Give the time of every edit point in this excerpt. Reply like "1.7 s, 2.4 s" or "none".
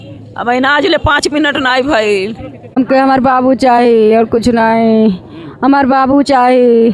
2.7 s